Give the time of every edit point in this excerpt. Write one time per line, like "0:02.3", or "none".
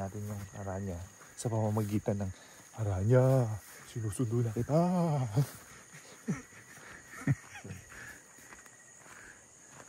none